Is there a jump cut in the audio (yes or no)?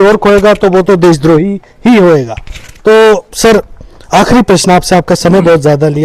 no